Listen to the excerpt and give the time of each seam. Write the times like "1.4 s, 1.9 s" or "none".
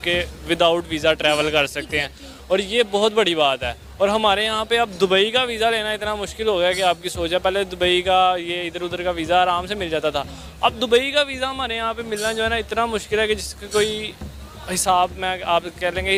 none